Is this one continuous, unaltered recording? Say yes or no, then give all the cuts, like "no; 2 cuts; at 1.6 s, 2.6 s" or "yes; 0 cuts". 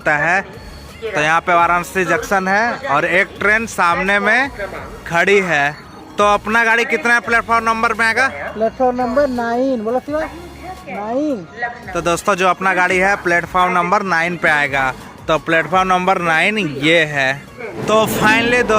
yes; 0 cuts